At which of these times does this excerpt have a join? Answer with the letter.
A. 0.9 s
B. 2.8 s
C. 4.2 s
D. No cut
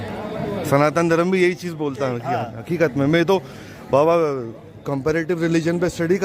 D